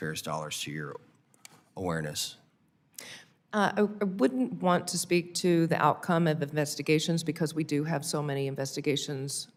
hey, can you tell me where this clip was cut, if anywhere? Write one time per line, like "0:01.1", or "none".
none